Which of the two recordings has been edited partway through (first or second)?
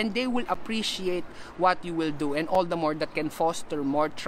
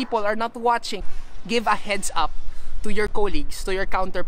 second